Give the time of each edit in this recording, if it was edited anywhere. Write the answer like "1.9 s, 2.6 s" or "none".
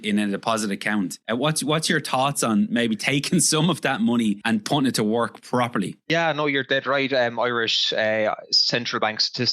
1.2 s, 4.4 s, 6.1 s